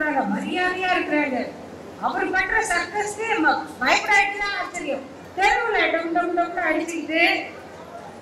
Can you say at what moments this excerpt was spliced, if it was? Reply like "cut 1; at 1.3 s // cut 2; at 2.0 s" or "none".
cut 1; at 5.2 s